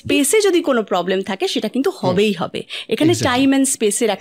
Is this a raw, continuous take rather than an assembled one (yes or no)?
yes